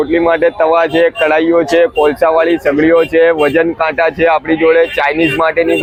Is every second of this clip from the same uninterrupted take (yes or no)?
yes